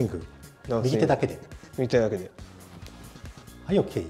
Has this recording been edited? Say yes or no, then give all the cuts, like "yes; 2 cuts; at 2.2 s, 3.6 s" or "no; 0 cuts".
no; 0 cuts